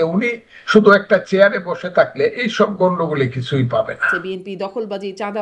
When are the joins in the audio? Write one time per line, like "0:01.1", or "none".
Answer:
0:04.1